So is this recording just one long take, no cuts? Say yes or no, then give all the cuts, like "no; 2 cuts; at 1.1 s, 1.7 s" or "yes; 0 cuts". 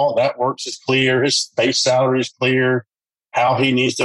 yes; 0 cuts